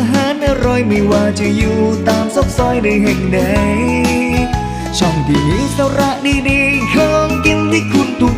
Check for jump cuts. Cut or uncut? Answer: uncut